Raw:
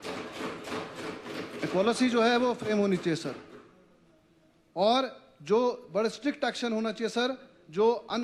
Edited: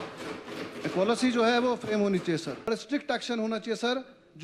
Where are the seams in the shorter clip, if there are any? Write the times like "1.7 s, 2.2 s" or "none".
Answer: 2.7 s